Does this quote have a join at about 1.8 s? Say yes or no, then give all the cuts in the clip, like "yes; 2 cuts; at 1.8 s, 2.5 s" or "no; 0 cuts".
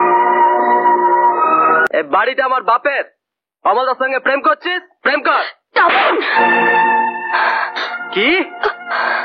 yes; 1 cut; at 1.8 s